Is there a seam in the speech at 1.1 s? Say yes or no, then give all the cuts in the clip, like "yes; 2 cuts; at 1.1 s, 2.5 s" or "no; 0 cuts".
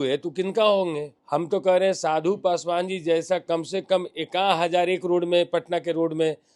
yes; 1 cut; at 1.1 s